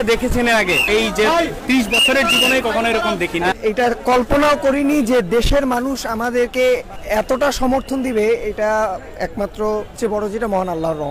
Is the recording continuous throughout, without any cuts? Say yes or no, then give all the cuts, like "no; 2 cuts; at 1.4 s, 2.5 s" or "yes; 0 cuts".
no; 4 cuts; at 0.8 s, 3.6 s, 6.9 s, 9.9 s